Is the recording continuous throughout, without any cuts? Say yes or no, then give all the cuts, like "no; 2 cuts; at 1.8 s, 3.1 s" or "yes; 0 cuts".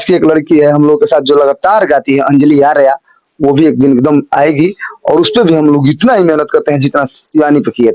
yes; 0 cuts